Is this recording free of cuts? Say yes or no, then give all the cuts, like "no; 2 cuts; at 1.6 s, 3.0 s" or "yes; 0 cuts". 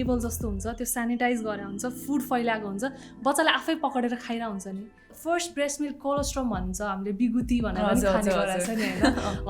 no; 1 cut; at 5.1 s